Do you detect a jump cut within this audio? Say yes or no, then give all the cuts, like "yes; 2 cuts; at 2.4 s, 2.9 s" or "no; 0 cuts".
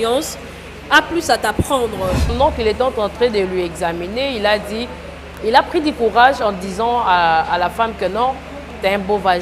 yes; 1 cut; at 2.3 s